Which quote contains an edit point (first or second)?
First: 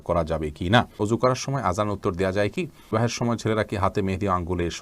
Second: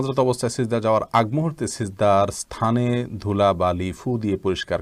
first